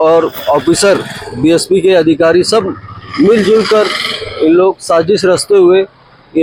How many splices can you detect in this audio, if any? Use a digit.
0